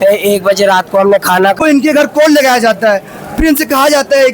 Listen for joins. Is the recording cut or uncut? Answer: cut